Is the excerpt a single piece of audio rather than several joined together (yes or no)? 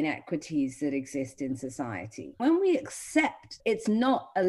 no